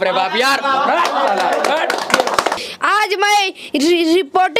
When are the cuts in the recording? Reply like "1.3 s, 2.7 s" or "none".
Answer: 2.5 s